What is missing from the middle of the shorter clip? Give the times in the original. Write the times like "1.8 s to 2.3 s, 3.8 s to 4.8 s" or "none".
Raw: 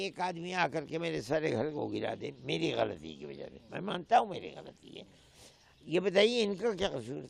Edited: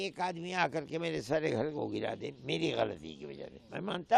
none